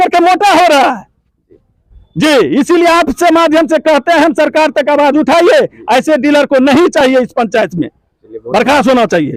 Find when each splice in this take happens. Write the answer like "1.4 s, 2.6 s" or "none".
none